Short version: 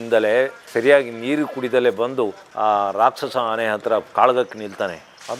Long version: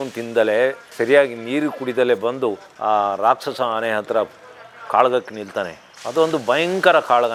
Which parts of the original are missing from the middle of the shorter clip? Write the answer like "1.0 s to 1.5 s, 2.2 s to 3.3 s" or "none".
4.3 s to 4.8 s